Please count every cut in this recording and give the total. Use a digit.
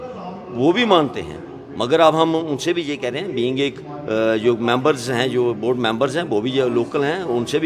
0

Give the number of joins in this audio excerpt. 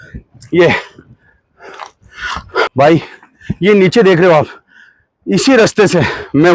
1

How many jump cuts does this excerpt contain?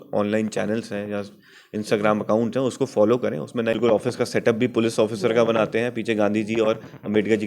1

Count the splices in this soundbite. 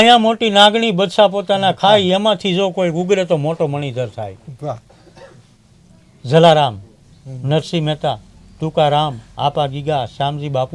0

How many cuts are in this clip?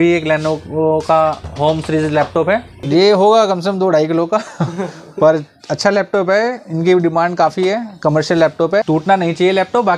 2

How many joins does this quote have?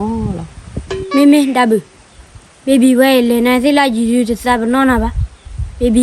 1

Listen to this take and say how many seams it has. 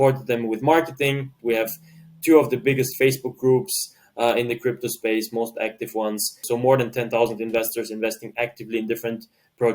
2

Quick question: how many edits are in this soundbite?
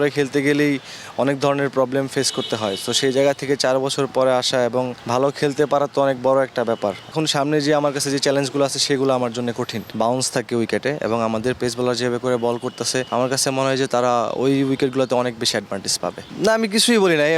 5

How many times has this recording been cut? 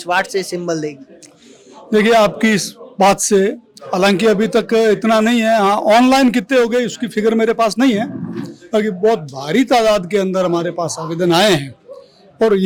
0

